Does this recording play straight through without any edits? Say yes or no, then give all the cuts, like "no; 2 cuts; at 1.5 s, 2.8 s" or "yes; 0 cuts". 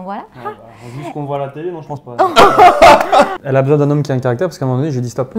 no; 1 cut; at 3.4 s